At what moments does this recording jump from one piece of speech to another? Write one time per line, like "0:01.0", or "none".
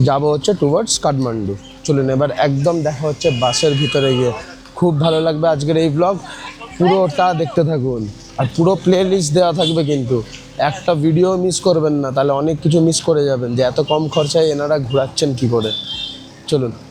none